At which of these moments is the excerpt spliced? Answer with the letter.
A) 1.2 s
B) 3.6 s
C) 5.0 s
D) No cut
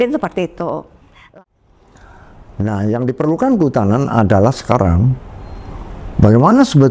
A